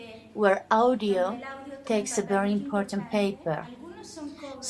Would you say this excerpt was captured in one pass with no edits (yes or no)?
yes